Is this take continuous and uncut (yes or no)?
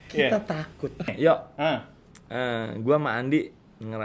no